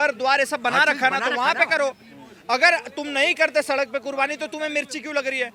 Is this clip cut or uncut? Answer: uncut